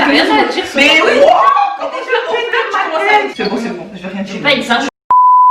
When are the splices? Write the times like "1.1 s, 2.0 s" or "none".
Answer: 3.3 s